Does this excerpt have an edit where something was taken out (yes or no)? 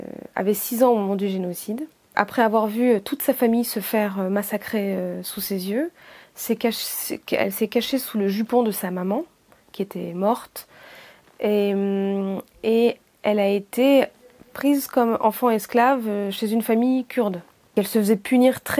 yes